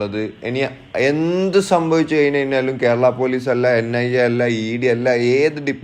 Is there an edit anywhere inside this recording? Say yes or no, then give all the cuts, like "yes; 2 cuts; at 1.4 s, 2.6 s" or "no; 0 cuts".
no; 0 cuts